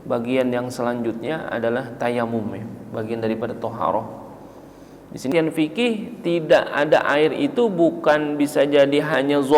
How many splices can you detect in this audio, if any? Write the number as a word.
one